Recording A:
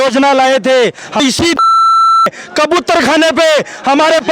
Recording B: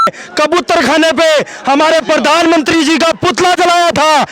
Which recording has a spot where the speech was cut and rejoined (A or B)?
A